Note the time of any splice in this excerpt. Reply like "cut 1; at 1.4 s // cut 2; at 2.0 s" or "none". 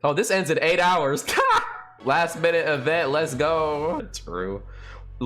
cut 1; at 1.8 s // cut 2; at 4.1 s